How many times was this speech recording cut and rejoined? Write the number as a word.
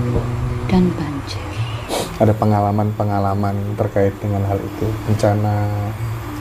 one